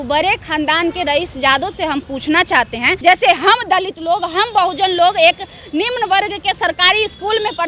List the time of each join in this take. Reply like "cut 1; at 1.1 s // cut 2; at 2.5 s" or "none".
cut 1; at 2.9 s

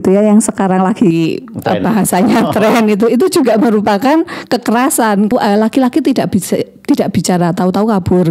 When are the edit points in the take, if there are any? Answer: cut 1; at 5.3 s

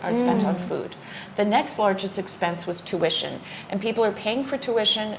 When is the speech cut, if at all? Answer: none

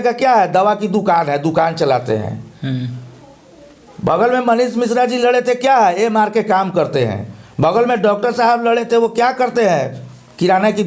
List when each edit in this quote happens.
none

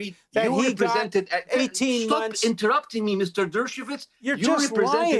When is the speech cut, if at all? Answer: none

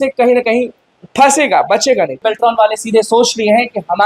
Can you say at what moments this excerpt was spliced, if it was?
cut 1; at 2.2 s

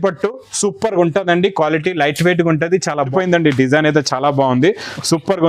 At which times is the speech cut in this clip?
cut 1; at 3.1 s

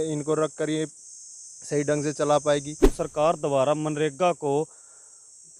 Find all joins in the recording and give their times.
cut 1; at 2.9 s

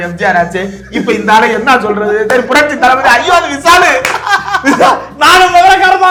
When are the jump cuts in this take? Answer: none

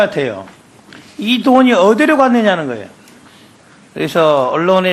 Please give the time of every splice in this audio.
none

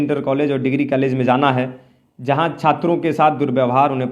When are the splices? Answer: none

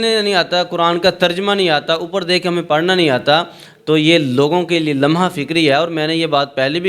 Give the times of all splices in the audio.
none

